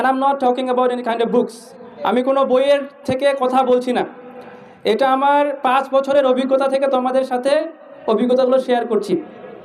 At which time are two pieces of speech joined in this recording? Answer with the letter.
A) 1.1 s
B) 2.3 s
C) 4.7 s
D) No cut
D